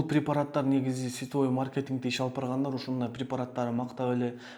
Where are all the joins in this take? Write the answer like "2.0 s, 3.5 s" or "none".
none